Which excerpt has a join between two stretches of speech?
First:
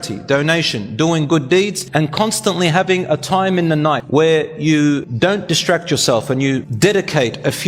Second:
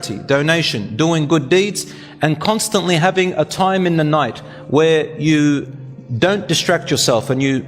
first; 4 cuts; at 1.8 s, 4.0 s, 5.1 s, 6.7 s

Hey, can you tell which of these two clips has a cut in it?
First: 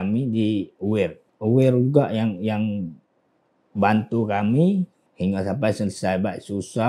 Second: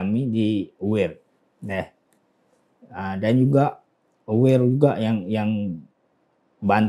first; 2 cuts; at 1.2 s, 5.0 s

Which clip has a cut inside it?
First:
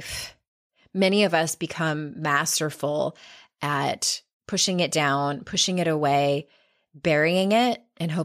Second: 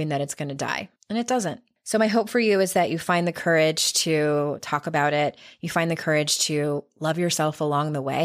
second; 2 cuts; at 0.9 s, 1.7 s

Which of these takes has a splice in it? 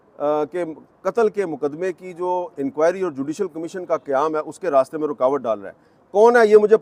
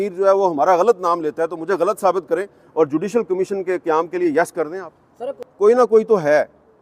second; 1 cut; at 5.5 s

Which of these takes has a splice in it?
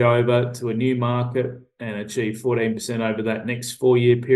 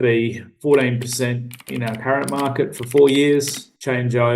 second; 1 cut; at 1.6 s

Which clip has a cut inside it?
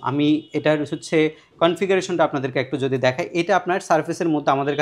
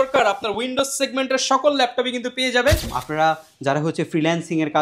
second; 1 cut; at 2.9 s

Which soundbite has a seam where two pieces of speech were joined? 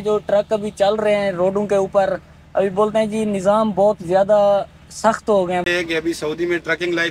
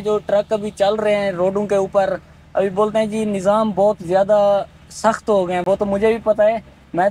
first; 1 cut; at 5.6 s

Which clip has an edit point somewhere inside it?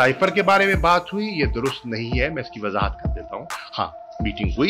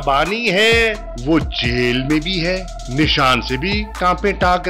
second; 3 cuts; at 1.1 s, 2.8 s, 3.9 s

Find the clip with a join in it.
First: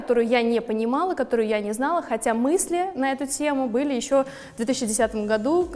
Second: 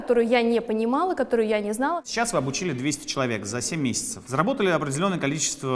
second; 2 cuts; at 2.0 s, 4.1 s

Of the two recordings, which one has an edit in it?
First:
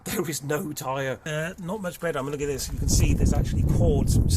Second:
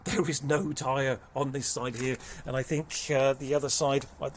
first; 1 cut; at 1.2 s

